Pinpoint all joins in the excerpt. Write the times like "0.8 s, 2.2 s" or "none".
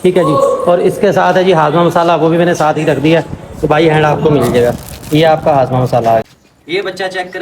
6.2 s